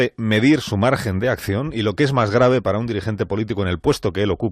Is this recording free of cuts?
no; 1 cut; at 1.0 s

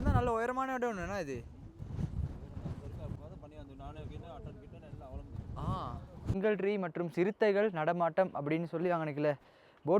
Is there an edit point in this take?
yes; 2 cuts; at 3.2 s, 6.3 s

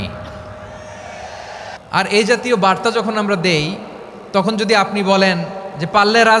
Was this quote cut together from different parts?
yes; 1 cut; at 1.7 s

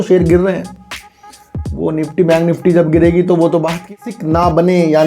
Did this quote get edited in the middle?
yes; 1 cut; at 3.9 s

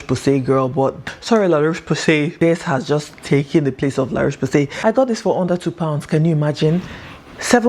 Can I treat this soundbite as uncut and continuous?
no; 3 cuts; at 1.0 s, 2.3 s, 4.7 s

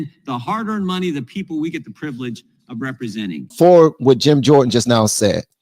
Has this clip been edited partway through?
yes; 1 cut; at 3.4 s

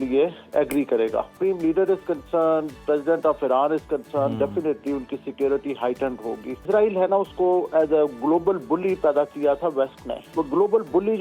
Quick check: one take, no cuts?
no; 3 cuts; at 1.3 s, 6.7 s, 10.3 s

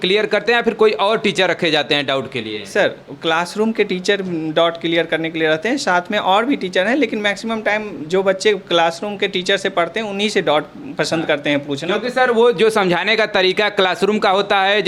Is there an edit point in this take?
no; 0 cuts

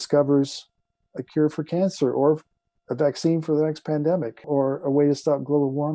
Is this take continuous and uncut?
no; 1 cut; at 4.4 s

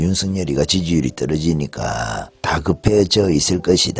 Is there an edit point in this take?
yes; 1 cut; at 2.3 s

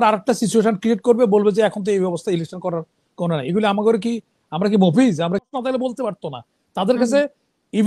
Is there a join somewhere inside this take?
yes; 1 cut; at 5.4 s

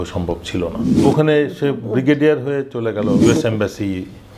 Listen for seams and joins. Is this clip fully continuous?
no; 2 cuts; at 1.0 s, 3.2 s

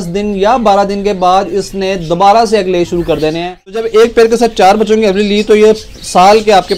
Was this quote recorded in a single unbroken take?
no; 1 cut; at 3.8 s

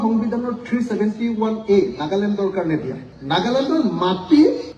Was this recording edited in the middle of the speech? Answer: yes; 1 cut; at 3.1 s

